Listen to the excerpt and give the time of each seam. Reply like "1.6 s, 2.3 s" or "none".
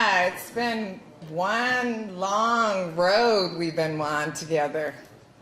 1.7 s